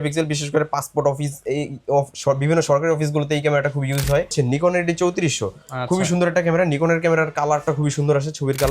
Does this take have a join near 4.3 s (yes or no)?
yes